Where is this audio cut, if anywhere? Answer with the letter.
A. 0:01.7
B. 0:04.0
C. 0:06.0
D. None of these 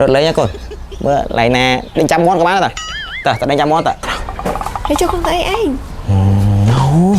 B